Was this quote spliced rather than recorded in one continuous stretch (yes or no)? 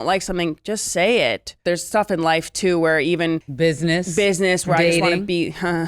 yes